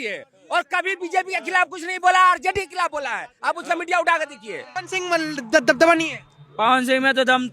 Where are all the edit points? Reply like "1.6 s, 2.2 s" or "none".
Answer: 4.8 s